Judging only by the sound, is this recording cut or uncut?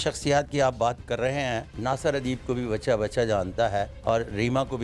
cut